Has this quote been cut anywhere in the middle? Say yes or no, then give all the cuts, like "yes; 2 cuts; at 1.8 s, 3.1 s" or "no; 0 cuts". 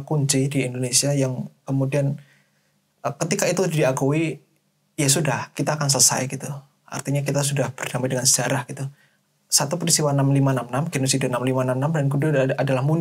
no; 0 cuts